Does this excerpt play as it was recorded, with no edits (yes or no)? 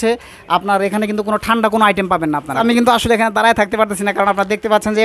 no